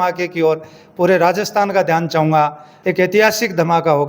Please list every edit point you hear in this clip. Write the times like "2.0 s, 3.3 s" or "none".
2.7 s